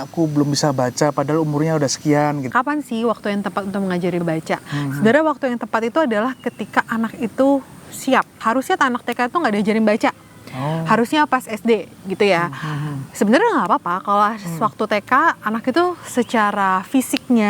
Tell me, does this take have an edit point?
yes; 3 cuts; at 2.5 s, 4.2 s, 8.4 s

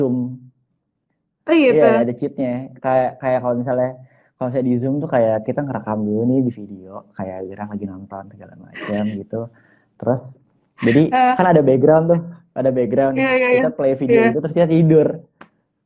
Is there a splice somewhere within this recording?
no; 0 cuts

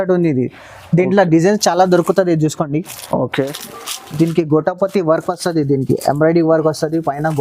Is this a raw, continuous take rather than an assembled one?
no; 1 cut; at 3.3 s

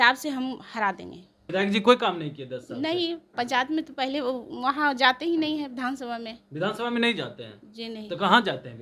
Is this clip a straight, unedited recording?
no; 1 cut; at 1.4 s

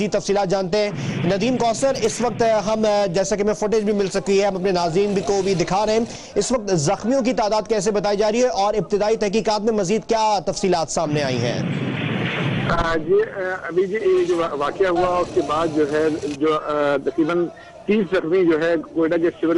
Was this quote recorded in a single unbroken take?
no; 1 cut; at 16.2 s

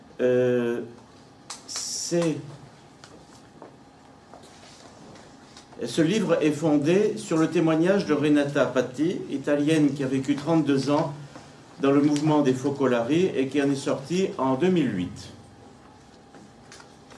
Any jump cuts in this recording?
yes; 1 cut; at 8.7 s

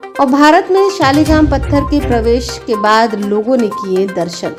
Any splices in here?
no; 0 cuts

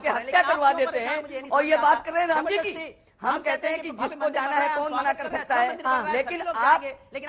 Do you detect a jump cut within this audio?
no; 0 cuts

